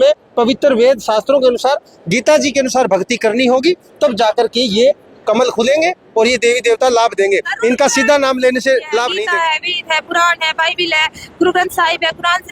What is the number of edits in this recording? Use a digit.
1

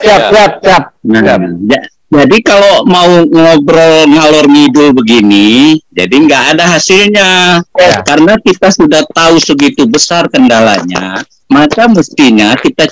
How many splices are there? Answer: 1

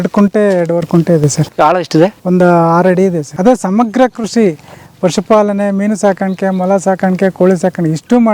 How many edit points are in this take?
3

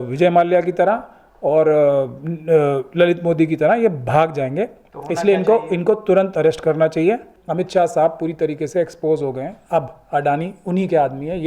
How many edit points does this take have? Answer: 1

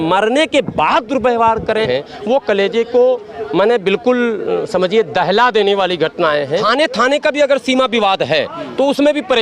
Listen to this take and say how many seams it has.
2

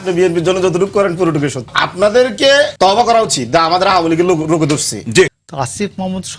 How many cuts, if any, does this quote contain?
3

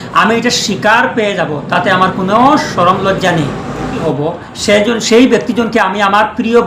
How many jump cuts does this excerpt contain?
1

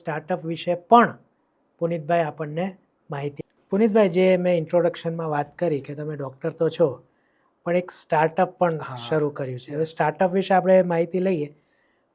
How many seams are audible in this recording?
1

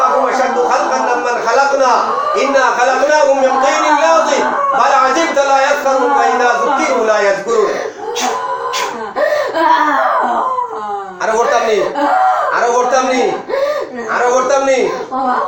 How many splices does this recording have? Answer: 0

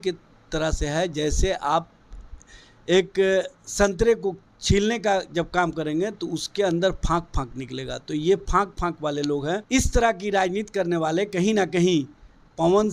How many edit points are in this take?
1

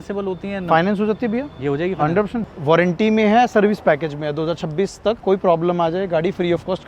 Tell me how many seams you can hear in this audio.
2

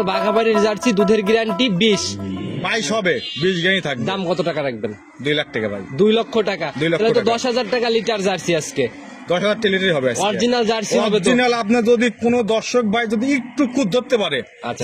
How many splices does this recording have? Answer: 0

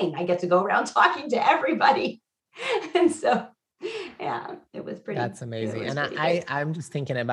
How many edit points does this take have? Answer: 0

